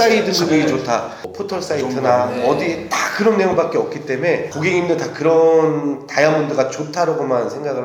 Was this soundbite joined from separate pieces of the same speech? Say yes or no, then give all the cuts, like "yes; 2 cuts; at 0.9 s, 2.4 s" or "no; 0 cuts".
yes; 2 cuts; at 1.2 s, 4.5 s